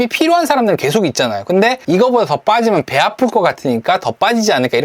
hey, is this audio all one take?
no; 1 cut; at 1.8 s

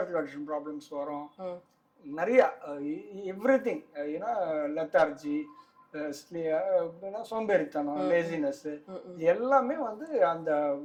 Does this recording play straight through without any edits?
yes; 0 cuts

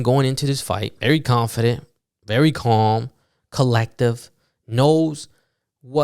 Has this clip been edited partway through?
yes; 1 cut; at 0.9 s

